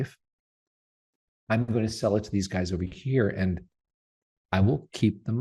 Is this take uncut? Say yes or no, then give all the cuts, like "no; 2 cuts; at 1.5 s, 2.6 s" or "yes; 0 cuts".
yes; 0 cuts